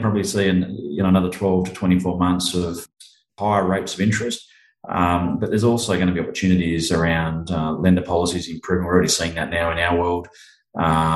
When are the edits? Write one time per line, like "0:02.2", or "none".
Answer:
0:02.8